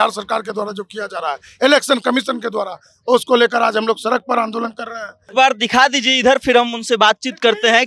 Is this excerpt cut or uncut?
cut